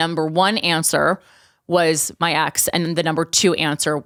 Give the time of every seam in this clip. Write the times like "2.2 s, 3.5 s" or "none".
none